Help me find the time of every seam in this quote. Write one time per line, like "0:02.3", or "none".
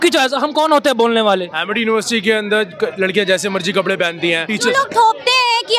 0:01.6
0:04.5